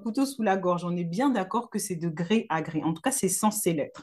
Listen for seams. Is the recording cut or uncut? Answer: uncut